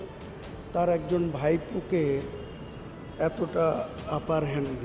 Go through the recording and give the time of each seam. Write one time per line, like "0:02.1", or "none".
none